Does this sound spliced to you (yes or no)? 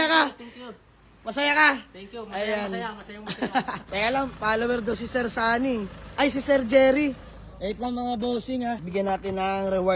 yes